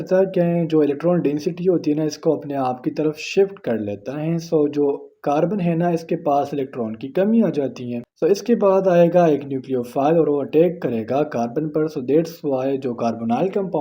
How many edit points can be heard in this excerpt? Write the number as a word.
zero